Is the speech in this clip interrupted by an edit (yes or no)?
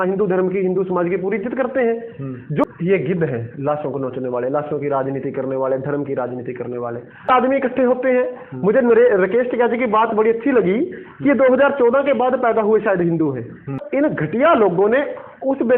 yes